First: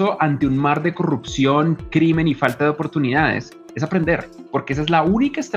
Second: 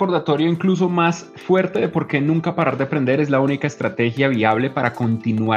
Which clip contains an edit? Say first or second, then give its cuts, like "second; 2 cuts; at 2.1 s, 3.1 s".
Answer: first; 1 cut; at 4.4 s